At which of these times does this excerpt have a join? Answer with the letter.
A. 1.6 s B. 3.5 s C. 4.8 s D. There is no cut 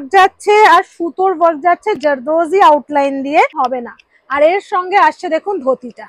B